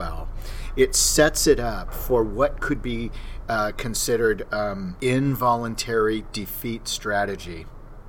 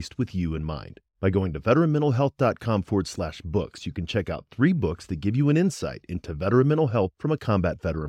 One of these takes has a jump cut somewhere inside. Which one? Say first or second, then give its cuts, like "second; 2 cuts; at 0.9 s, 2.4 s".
first; 1 cut; at 4.9 s